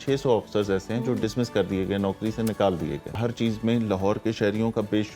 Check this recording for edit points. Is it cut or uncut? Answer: cut